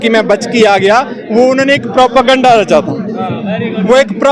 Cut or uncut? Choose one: uncut